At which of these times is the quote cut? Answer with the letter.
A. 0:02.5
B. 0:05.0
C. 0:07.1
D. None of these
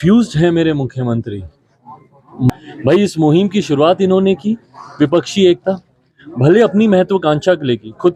A